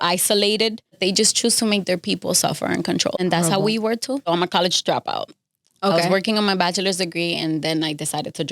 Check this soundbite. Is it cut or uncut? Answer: cut